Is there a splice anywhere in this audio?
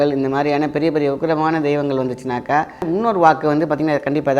yes; 1 cut; at 2.9 s

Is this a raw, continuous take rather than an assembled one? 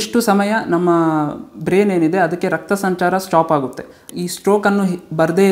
no; 1 cut; at 4.0 s

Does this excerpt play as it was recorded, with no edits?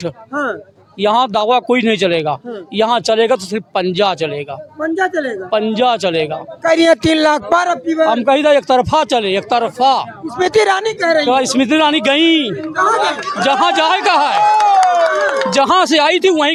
yes; 0 cuts

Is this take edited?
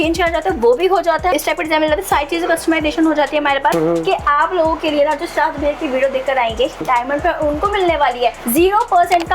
yes; 2 cuts; at 1.3 s, 3.7 s

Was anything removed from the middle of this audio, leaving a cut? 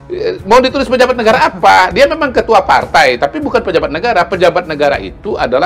no; 0 cuts

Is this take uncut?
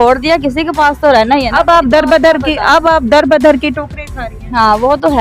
yes; 0 cuts

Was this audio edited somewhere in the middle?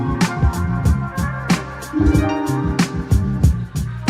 yes; 1 cut; at 3.2 s

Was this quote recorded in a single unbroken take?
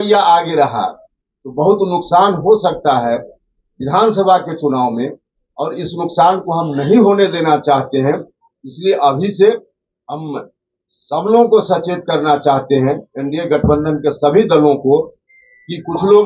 yes; 0 cuts

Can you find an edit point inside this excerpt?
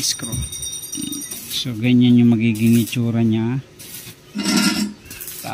yes; 1 cut; at 1.5 s

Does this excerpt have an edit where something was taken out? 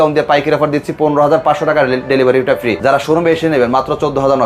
yes; 1 cut; at 2.8 s

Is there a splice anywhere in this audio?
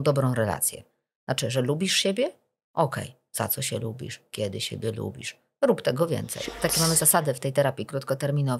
yes; 1 cut; at 6.5 s

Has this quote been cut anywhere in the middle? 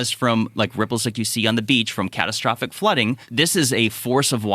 yes; 1 cut; at 3.2 s

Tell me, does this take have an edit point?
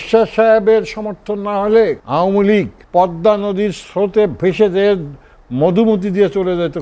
yes; 2 cuts; at 2.0 s, 2.8 s

